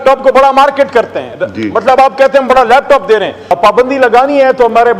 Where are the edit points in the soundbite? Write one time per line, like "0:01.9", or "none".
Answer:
0:03.4

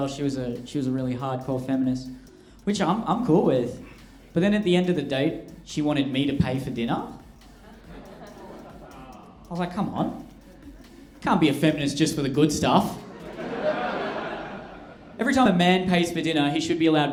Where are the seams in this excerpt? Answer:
none

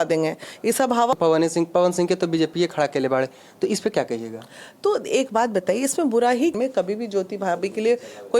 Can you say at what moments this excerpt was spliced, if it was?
0:01.1
0:06.6

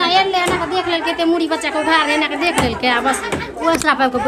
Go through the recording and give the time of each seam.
none

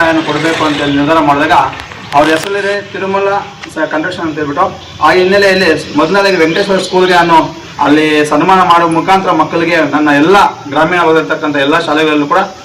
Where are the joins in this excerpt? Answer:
none

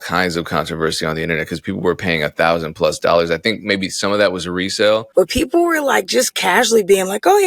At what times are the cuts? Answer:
0:05.1

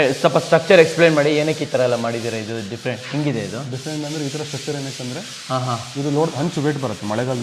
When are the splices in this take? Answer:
none

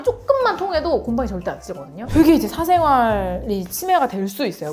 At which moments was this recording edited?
0:02.1

